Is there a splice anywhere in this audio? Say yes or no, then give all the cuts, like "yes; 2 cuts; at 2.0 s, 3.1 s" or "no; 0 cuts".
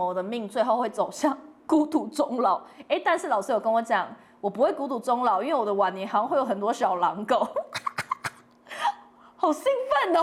no; 0 cuts